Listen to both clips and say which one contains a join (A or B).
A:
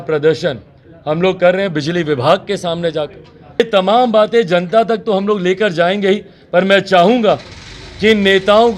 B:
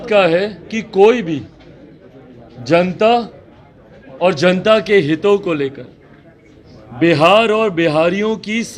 A